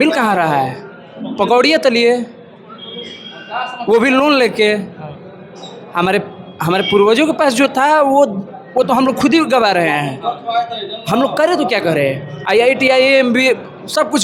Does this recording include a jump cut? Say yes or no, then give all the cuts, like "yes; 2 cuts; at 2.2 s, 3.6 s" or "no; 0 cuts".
no; 0 cuts